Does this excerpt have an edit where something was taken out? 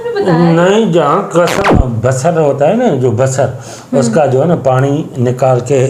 yes; 1 cut; at 1.7 s

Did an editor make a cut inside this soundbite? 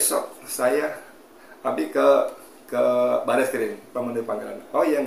no; 0 cuts

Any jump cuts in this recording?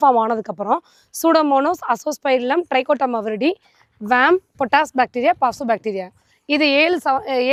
no; 0 cuts

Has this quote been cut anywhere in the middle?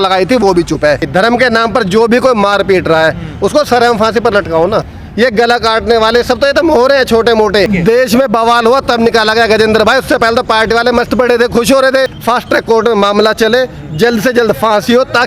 yes; 4 cuts; at 1.1 s, 5.0 s, 7.7 s, 12.2 s

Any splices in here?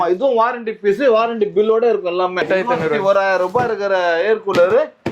yes; 1 cut; at 2.5 s

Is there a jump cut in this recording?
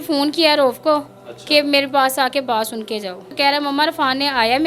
yes; 1 cut; at 3.3 s

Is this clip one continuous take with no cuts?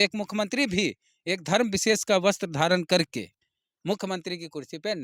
yes; 0 cuts

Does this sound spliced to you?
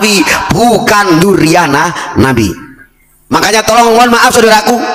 yes; 1 cut; at 3.3 s

